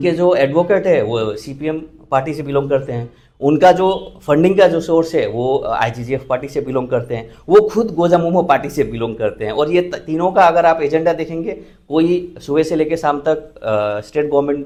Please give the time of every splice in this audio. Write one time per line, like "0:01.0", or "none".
none